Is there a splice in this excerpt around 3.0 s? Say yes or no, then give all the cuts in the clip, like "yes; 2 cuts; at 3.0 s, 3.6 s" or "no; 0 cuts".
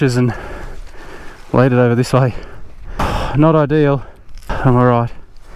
yes; 2 cuts; at 3.0 s, 4.5 s